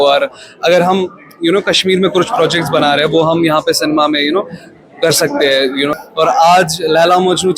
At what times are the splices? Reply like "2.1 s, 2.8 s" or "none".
5.9 s